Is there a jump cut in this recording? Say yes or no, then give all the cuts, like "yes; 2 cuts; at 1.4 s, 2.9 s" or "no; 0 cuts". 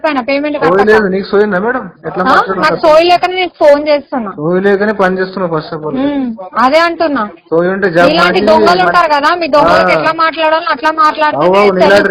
no; 0 cuts